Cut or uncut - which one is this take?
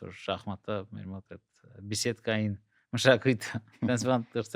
uncut